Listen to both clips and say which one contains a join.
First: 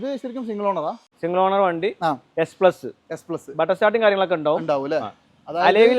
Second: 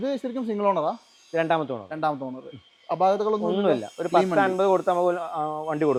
first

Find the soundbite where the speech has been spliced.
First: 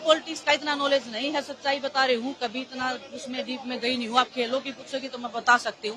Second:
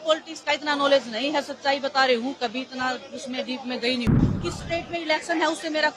second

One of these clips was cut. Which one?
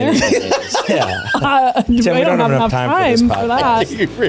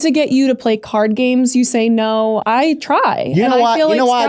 second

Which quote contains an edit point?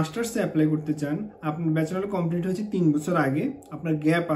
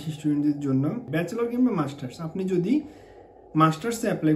second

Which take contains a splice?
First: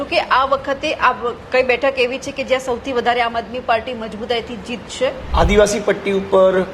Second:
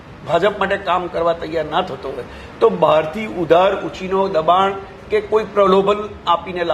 first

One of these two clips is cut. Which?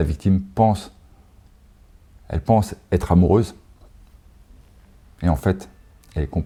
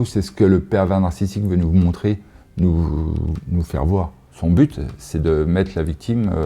second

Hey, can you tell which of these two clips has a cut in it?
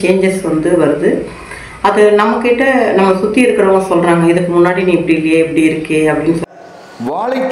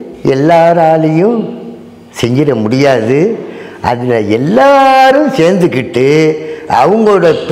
first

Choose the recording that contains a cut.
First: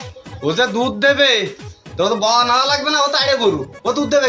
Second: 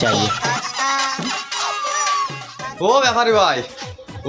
second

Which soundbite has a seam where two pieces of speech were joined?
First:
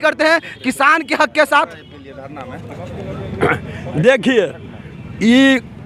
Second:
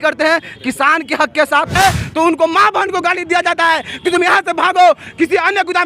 second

